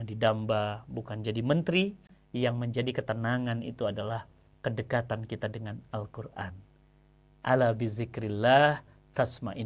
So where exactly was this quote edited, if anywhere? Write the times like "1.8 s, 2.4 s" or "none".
2.1 s